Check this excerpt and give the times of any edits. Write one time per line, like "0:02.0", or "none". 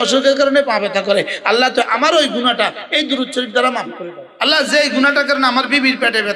0:04.2